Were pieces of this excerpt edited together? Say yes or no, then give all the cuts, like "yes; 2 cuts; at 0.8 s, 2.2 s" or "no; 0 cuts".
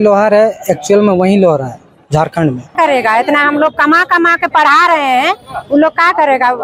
yes; 1 cut; at 2.7 s